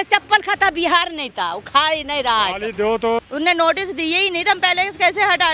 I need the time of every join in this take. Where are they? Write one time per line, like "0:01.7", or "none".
0:03.2